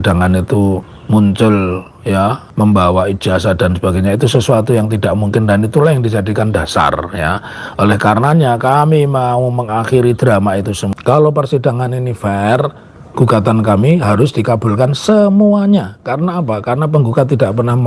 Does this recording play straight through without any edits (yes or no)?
no